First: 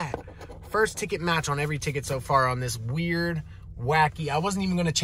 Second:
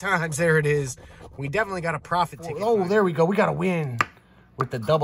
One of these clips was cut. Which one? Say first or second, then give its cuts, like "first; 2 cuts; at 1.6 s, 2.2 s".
second; 1 cut; at 2.4 s